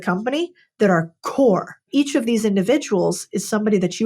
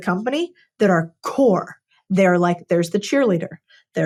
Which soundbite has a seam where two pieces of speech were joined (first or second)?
first